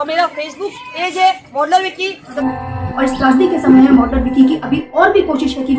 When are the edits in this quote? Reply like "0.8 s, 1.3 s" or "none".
2.3 s